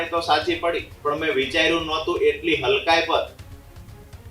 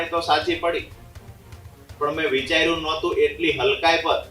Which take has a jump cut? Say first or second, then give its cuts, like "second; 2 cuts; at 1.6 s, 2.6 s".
first; 1 cut; at 0.9 s